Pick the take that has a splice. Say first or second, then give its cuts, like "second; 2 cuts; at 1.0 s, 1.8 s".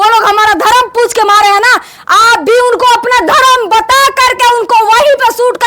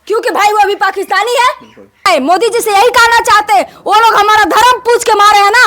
second; 1 cut; at 2.1 s